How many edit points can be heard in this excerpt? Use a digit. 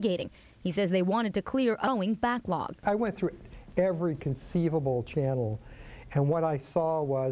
1